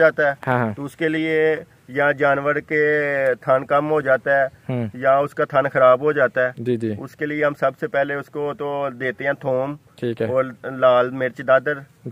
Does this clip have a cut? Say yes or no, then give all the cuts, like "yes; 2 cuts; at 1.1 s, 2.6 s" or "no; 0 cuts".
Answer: no; 0 cuts